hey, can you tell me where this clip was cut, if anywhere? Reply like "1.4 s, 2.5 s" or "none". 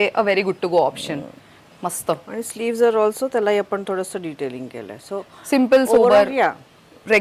none